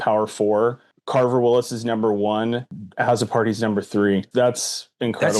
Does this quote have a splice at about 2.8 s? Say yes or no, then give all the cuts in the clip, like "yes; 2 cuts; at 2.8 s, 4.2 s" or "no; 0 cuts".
yes; 3 cuts; at 0.9 s, 2.8 s, 4.3 s